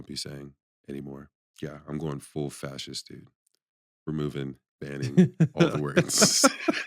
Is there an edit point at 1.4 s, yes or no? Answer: yes